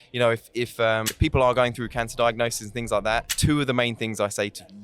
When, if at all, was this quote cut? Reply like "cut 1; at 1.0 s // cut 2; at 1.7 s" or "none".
cut 1; at 1.1 s // cut 2; at 3.3 s